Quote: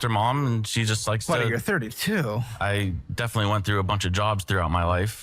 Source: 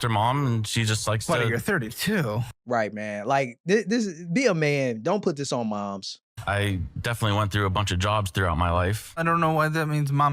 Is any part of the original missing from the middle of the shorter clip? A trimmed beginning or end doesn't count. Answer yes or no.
yes